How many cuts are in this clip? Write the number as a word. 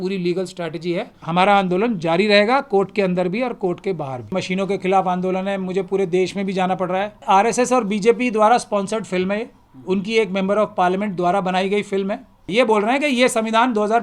four